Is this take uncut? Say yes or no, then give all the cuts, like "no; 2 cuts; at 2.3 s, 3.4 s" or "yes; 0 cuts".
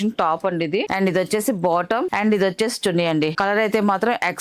no; 3 cuts; at 0.9 s, 2.1 s, 3.3 s